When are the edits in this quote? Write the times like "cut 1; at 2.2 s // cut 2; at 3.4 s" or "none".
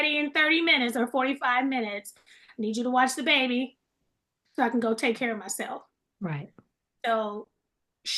none